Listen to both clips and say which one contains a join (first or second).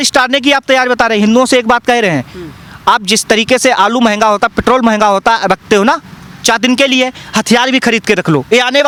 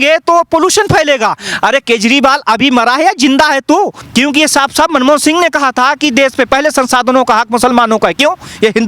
second